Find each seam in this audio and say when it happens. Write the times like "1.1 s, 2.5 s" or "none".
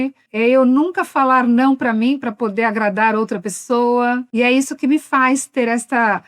4.3 s